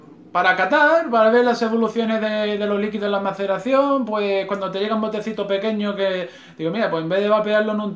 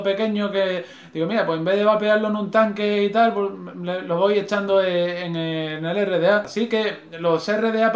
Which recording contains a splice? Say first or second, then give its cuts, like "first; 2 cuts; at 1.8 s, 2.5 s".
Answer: second; 1 cut; at 6.5 s